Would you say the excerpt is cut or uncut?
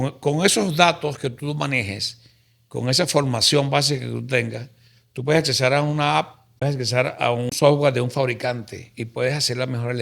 cut